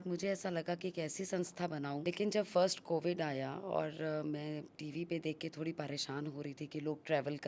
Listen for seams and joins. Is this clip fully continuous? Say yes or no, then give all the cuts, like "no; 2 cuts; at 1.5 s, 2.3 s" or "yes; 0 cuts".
no; 1 cut; at 2.0 s